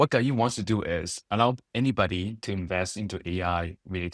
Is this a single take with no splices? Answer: yes; 0 cuts

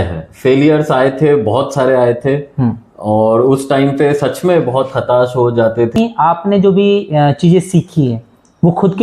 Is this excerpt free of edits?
no; 1 cut; at 6.0 s

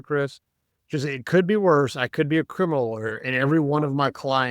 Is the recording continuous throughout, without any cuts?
yes; 0 cuts

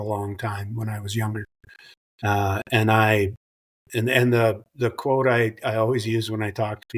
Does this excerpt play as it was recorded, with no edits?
yes; 0 cuts

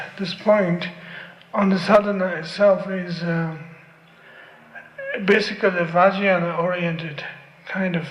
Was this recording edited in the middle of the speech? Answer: no; 0 cuts

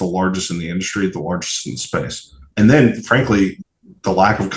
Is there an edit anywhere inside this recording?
yes; 2 cuts; at 2.5 s, 3.6 s

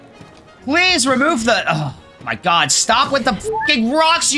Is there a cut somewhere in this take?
no; 0 cuts

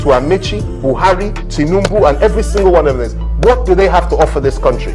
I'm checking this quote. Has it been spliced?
no; 0 cuts

